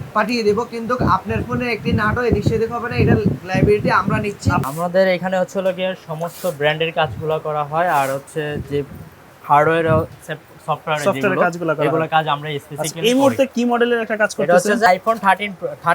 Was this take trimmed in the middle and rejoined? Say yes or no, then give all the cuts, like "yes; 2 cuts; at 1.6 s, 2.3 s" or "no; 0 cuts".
yes; 2 cuts; at 4.7 s, 14.9 s